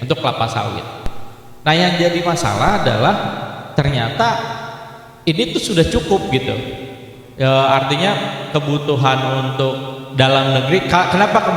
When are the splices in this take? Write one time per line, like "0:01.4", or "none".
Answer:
none